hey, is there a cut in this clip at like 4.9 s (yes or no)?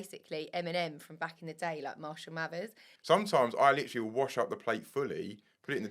no